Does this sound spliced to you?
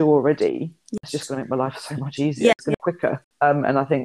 yes; 2 cuts; at 1.0 s, 2.7 s

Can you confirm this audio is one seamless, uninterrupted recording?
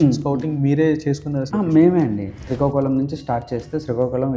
no; 2 cuts; at 1.4 s, 2.4 s

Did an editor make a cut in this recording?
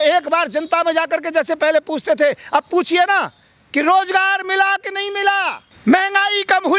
yes; 1 cut; at 5.6 s

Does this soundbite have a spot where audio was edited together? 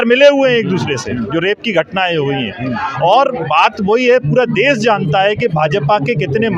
no; 0 cuts

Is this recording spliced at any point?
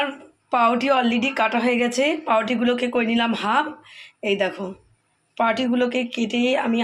no; 0 cuts

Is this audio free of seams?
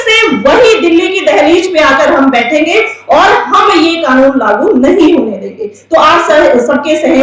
yes; 0 cuts

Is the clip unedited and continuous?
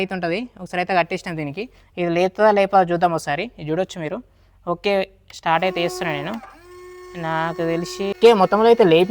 no; 1 cut; at 8.1 s

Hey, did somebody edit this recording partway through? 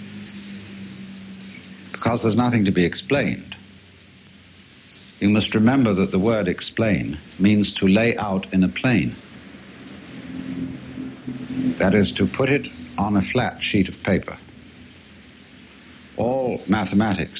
no; 0 cuts

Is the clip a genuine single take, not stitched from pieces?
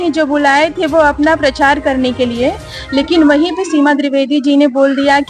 yes; 0 cuts

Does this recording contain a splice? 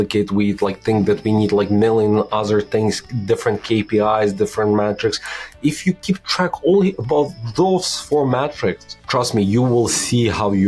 no; 0 cuts

